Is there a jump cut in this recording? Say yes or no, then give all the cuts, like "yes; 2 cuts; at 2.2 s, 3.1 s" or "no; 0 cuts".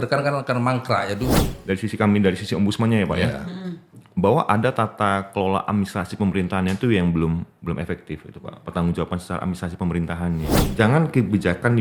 yes; 2 cuts; at 1.5 s, 10.6 s